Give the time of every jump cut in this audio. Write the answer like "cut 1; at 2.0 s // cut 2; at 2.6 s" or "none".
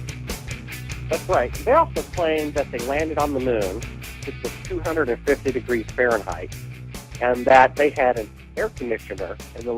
cut 1; at 4.1 s